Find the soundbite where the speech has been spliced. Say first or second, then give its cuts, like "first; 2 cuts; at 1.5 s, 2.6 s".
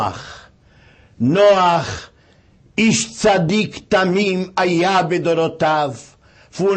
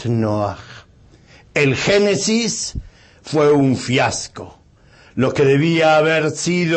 first; 1 cut; at 3.5 s